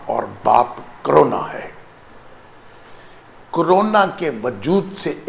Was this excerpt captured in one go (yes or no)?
yes